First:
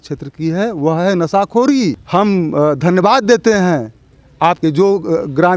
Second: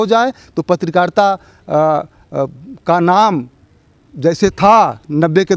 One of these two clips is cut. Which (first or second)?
first